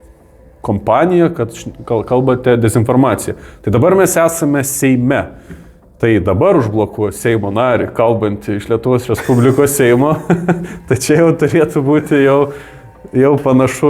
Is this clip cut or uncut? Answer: uncut